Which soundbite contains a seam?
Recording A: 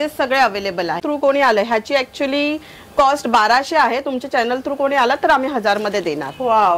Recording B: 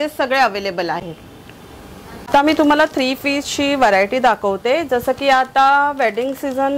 A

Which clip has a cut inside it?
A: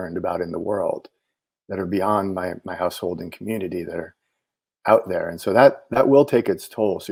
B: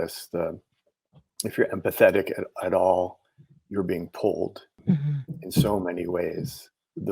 B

